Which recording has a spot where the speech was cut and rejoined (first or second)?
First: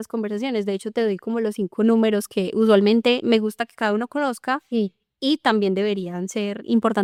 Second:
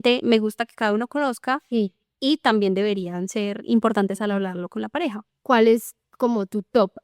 second